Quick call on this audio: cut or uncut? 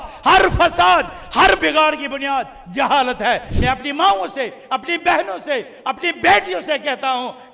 cut